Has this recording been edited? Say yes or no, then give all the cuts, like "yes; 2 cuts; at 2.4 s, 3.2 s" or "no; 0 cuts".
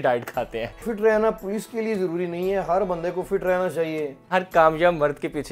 yes; 2 cuts; at 0.9 s, 4.3 s